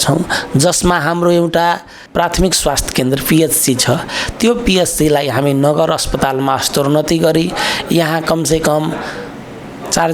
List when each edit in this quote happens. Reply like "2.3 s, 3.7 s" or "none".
2.0 s